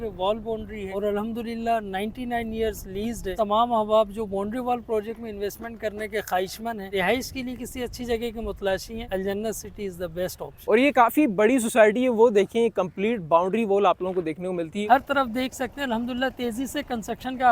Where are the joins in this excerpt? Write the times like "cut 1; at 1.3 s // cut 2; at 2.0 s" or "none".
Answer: cut 1; at 0.9 s // cut 2; at 3.3 s // cut 3; at 6.9 s // cut 4; at 9.0 s // cut 5; at 10.6 s // cut 6; at 14.8 s

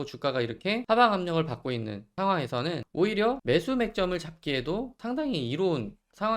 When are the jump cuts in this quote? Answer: cut 1; at 0.8 s // cut 2; at 2.0 s // cut 3; at 2.8 s // cut 4; at 3.4 s // cut 5; at 5.0 s

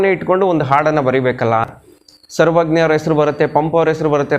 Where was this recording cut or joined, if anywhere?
cut 1; at 1.7 s

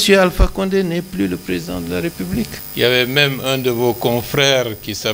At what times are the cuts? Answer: cut 1; at 2.6 s

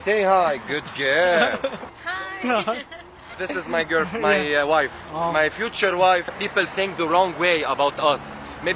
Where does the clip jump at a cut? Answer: cut 1; at 1.9 s // cut 2; at 6.3 s

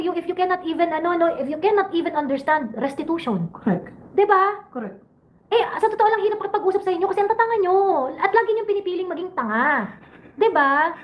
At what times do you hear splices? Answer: none

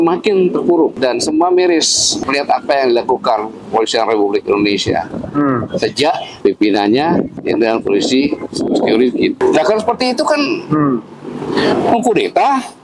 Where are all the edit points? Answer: cut 1; at 1.0 s // cut 2; at 2.2 s // cut 3; at 6.3 s // cut 4; at 7.4 s // cut 5; at 9.4 s

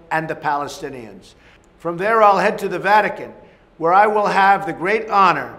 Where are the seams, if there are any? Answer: none

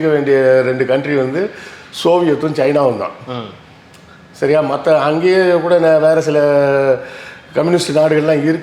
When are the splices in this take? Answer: none

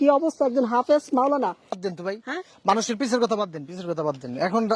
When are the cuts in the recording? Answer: cut 1; at 1.8 s

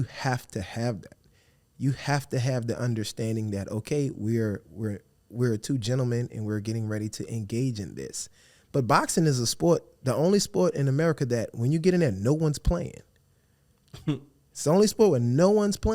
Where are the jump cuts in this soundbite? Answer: none

